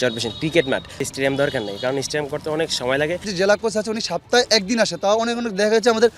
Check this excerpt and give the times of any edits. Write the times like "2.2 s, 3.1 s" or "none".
1.1 s, 3.3 s